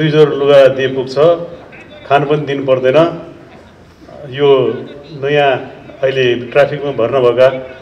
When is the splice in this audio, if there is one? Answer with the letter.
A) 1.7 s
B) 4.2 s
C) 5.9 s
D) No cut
D